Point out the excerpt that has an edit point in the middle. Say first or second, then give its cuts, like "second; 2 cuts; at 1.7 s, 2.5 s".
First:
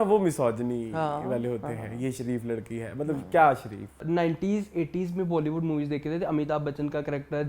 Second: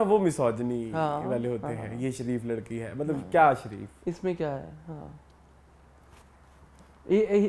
first; 1 cut; at 4.0 s